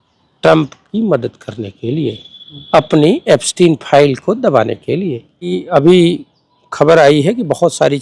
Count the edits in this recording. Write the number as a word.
one